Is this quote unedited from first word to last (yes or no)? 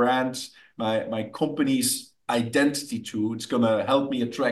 yes